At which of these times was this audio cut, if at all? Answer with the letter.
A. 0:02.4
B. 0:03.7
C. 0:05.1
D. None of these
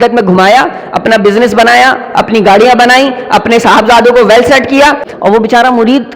C